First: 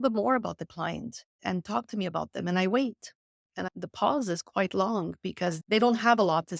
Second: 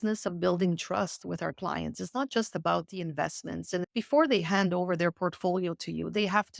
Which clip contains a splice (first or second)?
first